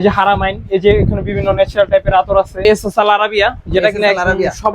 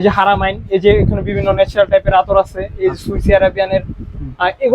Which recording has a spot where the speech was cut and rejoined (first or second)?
first